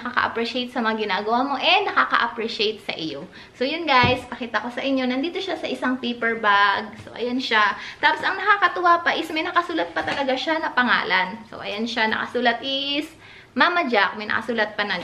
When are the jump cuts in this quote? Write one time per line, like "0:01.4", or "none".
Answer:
none